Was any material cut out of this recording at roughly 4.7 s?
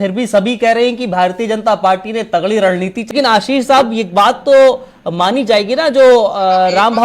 no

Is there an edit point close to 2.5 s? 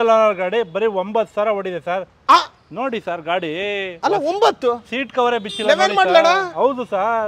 no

